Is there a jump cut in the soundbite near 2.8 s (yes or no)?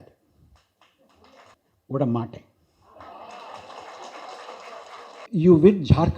no